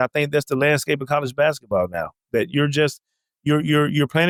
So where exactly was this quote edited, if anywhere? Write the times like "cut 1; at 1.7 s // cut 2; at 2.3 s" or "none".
none